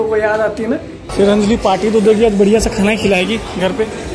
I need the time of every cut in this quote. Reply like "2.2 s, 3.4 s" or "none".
1.0 s